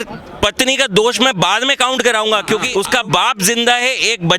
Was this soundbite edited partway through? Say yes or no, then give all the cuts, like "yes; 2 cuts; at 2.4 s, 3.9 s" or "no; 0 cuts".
yes; 1 cut; at 2.7 s